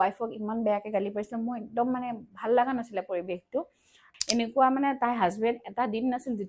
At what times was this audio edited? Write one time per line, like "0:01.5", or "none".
0:04.1